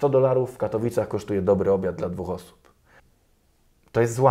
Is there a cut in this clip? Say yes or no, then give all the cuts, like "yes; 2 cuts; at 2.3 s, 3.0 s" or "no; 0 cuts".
yes; 1 cut; at 3.0 s